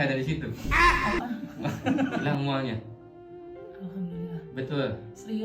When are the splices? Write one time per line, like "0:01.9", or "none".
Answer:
0:02.2